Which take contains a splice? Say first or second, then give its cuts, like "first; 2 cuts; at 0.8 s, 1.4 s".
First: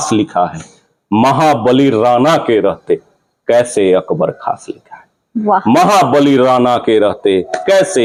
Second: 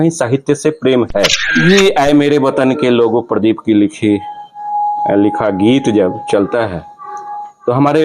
second; 1 cut; at 1.6 s